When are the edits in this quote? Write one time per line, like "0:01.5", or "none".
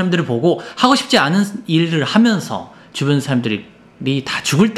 none